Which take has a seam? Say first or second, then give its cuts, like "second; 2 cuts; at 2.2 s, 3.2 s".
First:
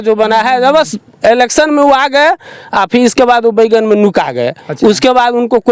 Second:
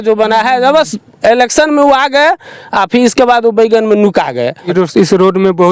second; 1 cut; at 4.7 s